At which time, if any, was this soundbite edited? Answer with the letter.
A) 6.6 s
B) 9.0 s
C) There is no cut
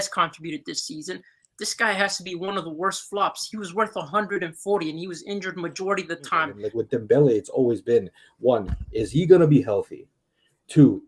A